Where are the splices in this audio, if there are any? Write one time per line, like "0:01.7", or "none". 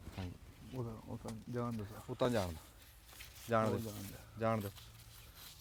none